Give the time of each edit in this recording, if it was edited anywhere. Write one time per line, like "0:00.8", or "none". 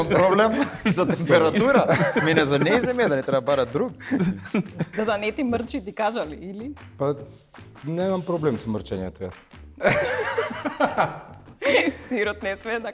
0:05.0